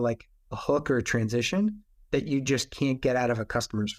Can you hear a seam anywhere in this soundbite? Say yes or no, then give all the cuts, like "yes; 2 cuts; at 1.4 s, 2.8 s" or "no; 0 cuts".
no; 0 cuts